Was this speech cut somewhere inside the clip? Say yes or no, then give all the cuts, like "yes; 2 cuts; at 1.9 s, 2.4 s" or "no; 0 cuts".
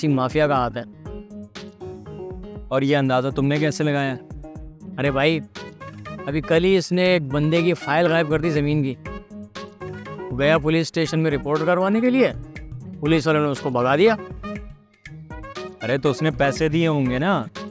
no; 0 cuts